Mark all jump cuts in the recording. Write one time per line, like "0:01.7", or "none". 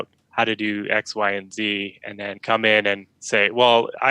0:02.4
0:03.1